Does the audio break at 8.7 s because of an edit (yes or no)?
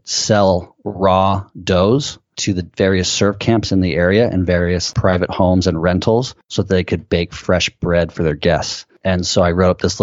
no